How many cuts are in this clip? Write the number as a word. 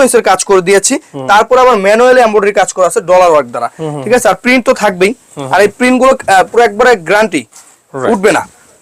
zero